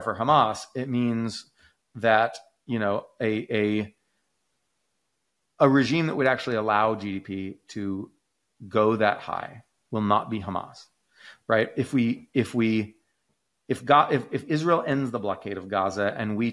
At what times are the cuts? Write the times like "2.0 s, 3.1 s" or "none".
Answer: none